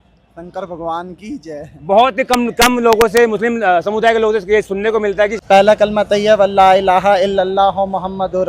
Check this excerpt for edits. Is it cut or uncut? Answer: cut